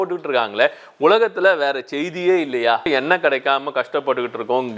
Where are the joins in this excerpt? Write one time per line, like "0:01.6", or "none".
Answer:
0:02.9